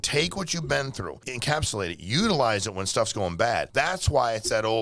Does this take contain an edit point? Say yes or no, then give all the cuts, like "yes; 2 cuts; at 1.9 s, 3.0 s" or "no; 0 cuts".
yes; 2 cuts; at 1.3 s, 3.7 s